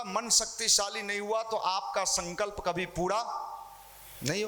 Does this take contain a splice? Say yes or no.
no